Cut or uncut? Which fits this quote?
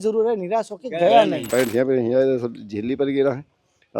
cut